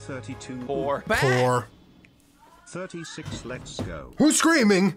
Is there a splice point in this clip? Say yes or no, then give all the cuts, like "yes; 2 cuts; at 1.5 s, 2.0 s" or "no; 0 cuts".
yes; 1 cut; at 1.1 s